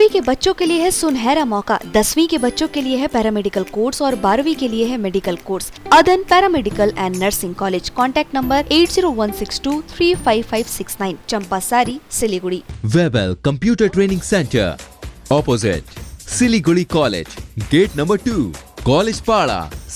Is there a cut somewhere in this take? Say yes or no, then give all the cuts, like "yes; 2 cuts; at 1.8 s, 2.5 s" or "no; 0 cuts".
yes; 2 cuts; at 5.7 s, 12.7 s